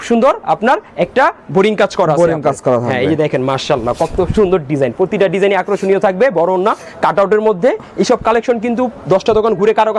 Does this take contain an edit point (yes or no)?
no